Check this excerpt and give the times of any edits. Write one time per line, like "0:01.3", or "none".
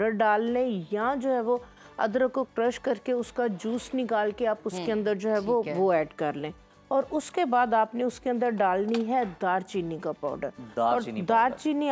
none